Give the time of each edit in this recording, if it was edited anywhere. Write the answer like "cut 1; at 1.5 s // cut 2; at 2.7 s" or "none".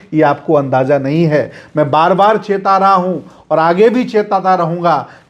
none